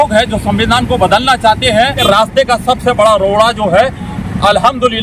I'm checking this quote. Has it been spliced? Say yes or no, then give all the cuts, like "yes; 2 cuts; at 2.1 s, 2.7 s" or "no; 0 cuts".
yes; 1 cut; at 2.0 s